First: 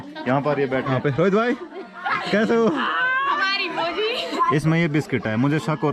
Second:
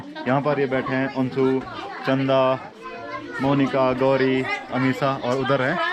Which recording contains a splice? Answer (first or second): first